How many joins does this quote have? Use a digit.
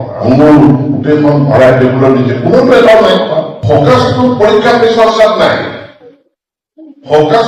1